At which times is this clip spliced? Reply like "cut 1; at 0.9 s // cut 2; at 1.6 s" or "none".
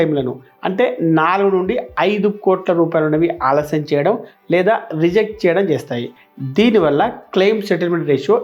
none